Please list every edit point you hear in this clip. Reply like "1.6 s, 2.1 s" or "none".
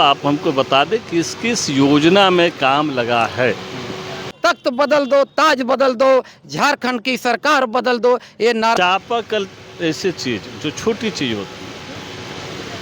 4.3 s, 8.8 s